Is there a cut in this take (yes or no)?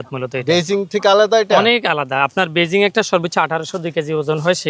no